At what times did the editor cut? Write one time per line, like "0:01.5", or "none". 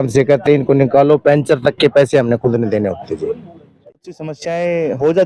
0:03.9